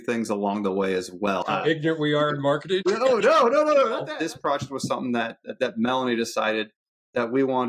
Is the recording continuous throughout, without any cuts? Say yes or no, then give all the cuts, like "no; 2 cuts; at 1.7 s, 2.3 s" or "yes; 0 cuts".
no; 3 cuts; at 1.5 s, 2.8 s, 4.1 s